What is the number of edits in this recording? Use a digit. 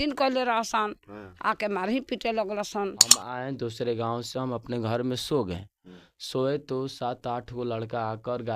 1